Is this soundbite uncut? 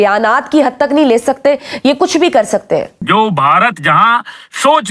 no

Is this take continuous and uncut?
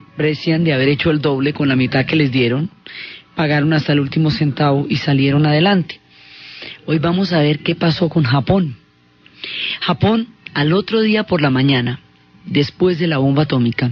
yes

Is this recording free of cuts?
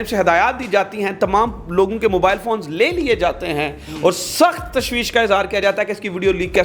yes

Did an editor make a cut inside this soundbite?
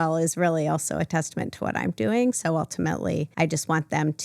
yes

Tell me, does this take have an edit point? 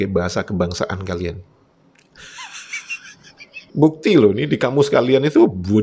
yes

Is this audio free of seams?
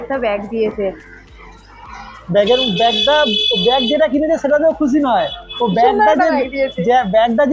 yes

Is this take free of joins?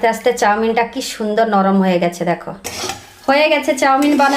no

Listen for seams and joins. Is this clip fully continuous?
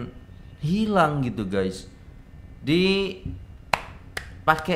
yes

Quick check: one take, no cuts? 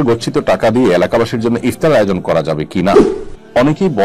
no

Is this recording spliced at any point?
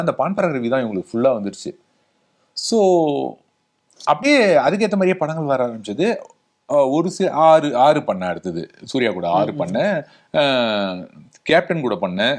no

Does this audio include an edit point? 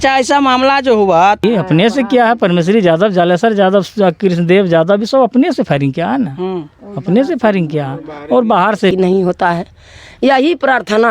yes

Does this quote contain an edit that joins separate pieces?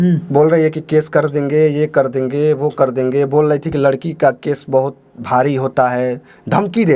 no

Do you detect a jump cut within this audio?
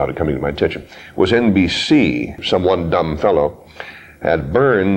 yes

